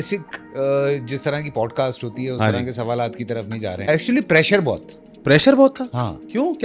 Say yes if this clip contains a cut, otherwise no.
yes